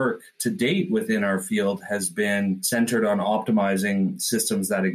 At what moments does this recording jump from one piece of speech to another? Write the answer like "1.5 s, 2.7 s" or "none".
none